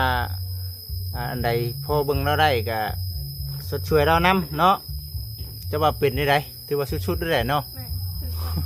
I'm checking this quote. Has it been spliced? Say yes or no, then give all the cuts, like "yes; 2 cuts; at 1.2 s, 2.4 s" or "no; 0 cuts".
no; 0 cuts